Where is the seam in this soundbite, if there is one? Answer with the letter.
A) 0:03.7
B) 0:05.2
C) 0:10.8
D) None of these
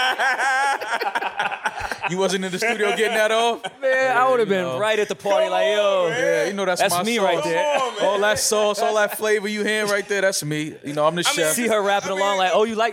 D